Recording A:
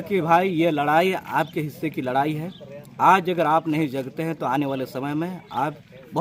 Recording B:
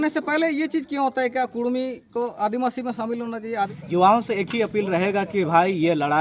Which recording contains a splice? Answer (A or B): B